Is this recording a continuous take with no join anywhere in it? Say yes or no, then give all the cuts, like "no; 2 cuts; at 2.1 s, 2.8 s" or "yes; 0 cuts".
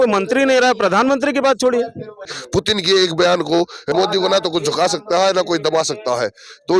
no; 2 cuts; at 2.4 s, 3.9 s